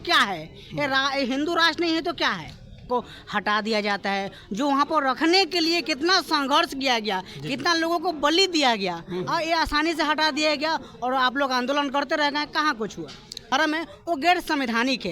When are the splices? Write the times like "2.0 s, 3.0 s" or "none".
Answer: 2.9 s, 13.5 s